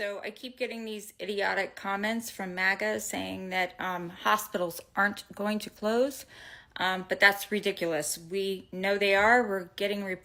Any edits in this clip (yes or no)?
no